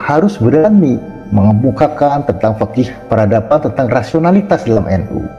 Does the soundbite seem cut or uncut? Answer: cut